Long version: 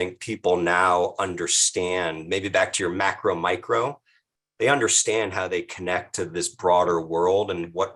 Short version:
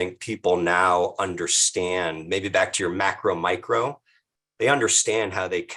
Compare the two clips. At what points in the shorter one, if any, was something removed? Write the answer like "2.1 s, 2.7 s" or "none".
none